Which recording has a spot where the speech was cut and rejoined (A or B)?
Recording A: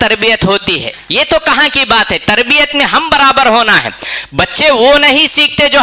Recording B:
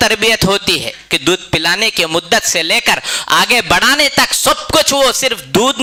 A